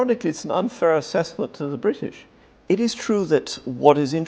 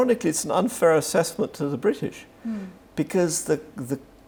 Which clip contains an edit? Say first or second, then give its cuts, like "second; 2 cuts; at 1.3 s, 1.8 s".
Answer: first; 1 cut; at 2.3 s